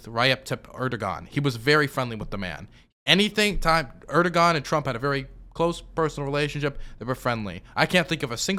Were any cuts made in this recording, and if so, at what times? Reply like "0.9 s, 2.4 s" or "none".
none